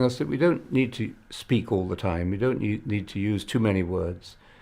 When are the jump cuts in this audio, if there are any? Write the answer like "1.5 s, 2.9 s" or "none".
none